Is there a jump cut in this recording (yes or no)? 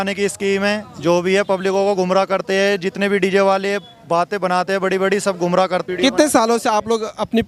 no